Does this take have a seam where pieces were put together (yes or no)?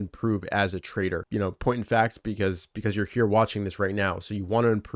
yes